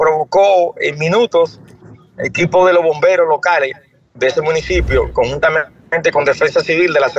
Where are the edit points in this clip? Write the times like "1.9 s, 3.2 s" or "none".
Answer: none